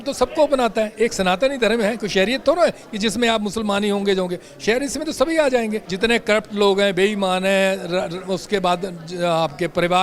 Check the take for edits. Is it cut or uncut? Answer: cut